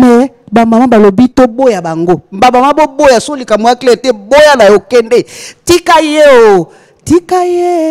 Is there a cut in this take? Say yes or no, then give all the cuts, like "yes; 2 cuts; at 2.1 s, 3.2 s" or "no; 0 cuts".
no; 0 cuts